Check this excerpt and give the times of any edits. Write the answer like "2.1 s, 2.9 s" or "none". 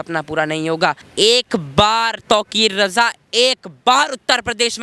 1.0 s